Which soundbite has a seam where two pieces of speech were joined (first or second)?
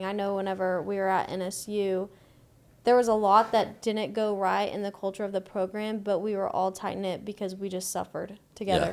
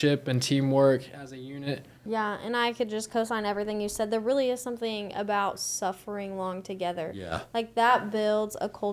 second